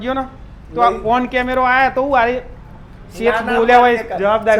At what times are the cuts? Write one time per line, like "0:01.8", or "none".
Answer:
none